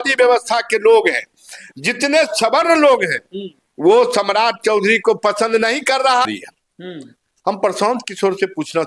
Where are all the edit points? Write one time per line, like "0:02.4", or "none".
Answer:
0:06.3

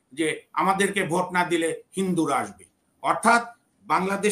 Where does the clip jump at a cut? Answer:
none

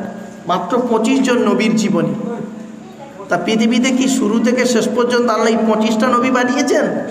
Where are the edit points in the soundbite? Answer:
none

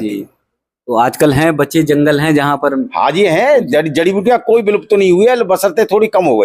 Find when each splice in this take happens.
none

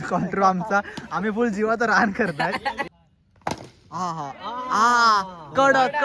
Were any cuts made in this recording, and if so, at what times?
0:02.9

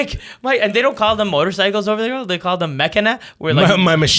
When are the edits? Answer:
none

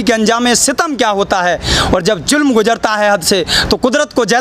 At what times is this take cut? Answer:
none

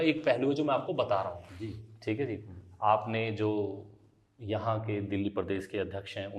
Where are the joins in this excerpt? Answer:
none

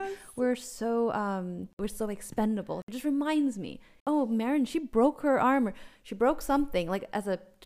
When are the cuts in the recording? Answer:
0:01.8
0:02.8
0:03.9

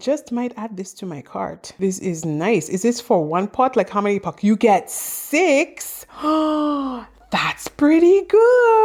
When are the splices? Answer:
none

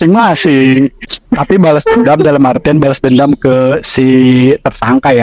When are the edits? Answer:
0:01.1

